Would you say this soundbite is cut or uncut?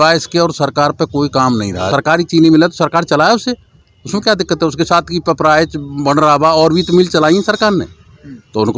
cut